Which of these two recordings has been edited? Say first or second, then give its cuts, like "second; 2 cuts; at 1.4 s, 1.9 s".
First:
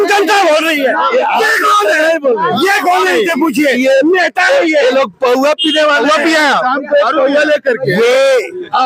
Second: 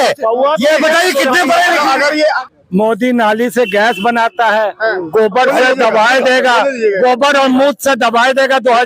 second; 1 cut; at 2.5 s